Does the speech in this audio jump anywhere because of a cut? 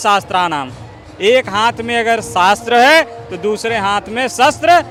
no; 0 cuts

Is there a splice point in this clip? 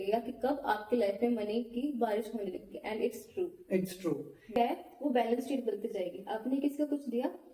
yes; 1 cut; at 4.5 s

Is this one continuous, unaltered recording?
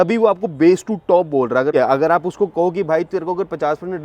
no; 1 cut; at 1.7 s

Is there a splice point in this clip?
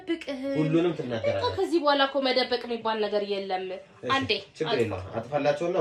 no; 0 cuts

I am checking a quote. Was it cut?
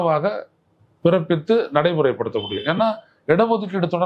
no; 0 cuts

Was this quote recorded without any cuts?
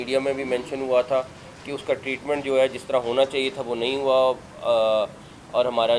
yes; 0 cuts

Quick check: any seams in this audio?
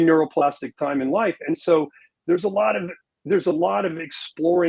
no; 0 cuts

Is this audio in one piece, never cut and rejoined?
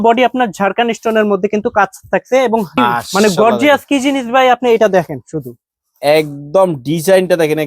no; 1 cut; at 2.8 s

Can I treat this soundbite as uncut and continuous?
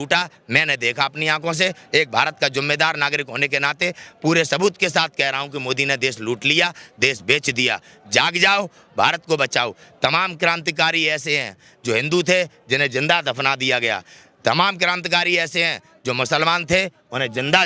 yes; 0 cuts

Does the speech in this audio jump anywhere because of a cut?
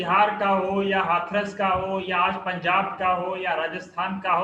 no; 0 cuts

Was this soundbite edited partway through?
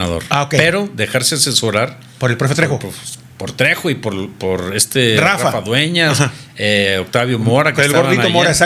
no; 0 cuts

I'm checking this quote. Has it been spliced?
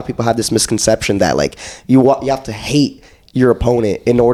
no; 0 cuts

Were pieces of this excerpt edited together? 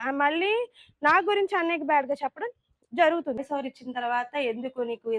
yes; 1 cut; at 3.4 s

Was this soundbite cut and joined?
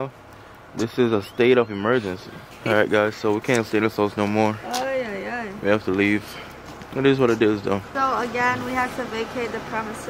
yes; 2 cuts; at 2.6 s, 7.9 s

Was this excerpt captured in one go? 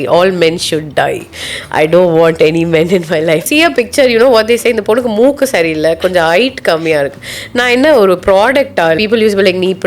no; 2 cuts; at 3.5 s, 9.0 s

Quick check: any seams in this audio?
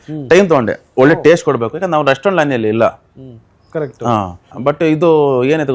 no; 0 cuts

